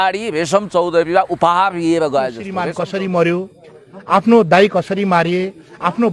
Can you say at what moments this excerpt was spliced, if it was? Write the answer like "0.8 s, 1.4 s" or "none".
2.5 s